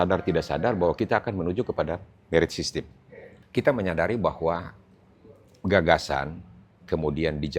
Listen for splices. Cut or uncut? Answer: cut